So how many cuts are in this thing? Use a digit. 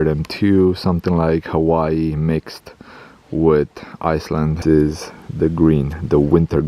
1